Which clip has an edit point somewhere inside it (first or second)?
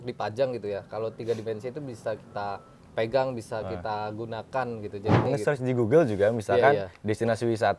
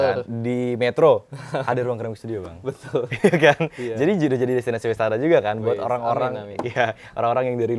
first